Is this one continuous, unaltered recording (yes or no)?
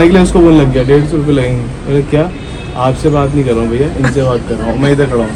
yes